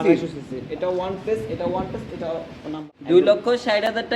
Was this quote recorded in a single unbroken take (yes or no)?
no